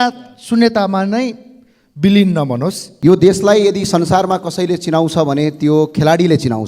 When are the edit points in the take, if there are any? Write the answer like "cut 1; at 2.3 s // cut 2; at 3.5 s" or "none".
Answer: cut 1; at 2.9 s

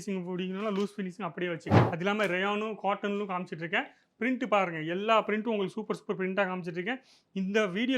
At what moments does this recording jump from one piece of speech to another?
cut 1; at 1.7 s

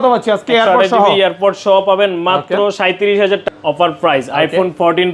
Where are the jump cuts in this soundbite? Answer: cut 1; at 3.4 s

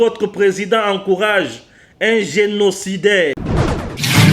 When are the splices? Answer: cut 1; at 3.4 s

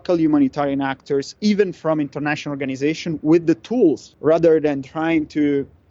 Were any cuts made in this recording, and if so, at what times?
cut 1; at 4.1 s

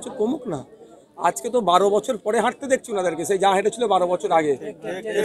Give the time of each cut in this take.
none

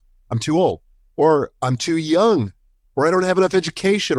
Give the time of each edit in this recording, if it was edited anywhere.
none

